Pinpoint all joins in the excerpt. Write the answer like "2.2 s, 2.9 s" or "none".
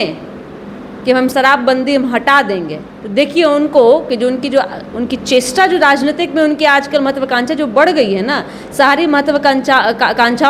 1.3 s